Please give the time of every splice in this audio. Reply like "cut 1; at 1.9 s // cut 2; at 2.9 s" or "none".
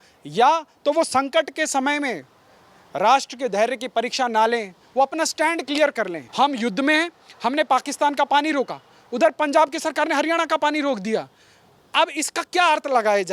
cut 1; at 6.2 s